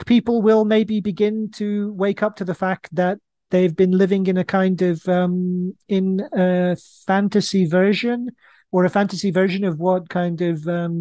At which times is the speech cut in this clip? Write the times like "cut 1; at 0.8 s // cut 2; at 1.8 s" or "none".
none